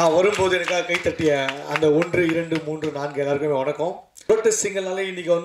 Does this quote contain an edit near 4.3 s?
yes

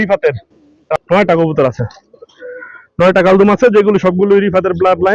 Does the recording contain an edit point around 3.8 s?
no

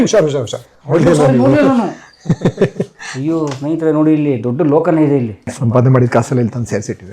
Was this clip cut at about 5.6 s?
yes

